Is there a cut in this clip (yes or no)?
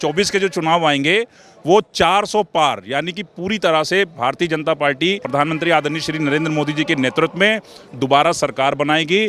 yes